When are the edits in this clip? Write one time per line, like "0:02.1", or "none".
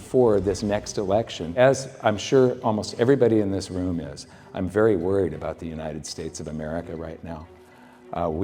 0:01.5

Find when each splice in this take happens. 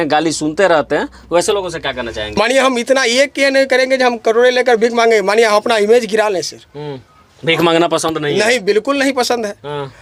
0:02.4

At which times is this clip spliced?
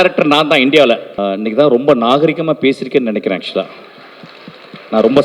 0:01.1

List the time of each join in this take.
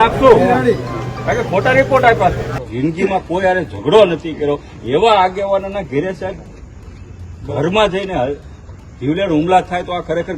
0:02.5

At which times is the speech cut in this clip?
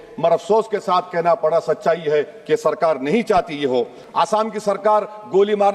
0:04.0

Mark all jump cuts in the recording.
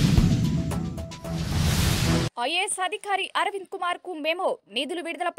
none

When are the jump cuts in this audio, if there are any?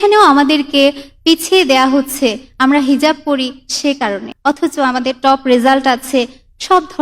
0:04.3

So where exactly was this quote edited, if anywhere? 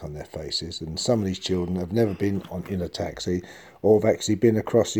none

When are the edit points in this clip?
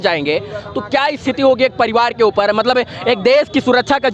none

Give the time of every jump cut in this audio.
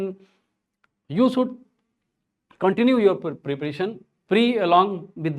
0:04.1

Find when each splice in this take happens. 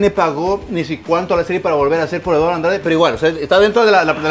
none

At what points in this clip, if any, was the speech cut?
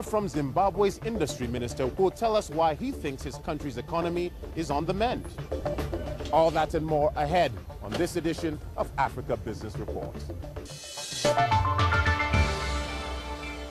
0:03.4

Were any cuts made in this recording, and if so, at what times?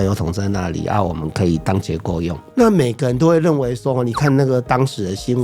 0:02.4

